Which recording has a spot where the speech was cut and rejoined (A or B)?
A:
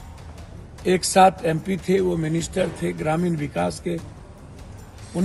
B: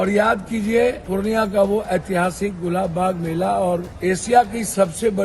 B